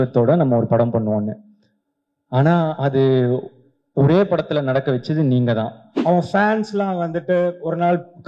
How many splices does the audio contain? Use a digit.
1